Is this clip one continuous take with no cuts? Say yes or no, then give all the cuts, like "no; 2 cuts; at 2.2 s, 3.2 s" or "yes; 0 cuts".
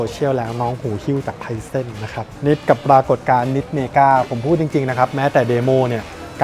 no; 1 cut; at 2.2 s